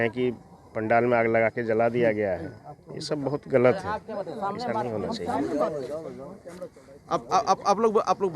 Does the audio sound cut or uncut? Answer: uncut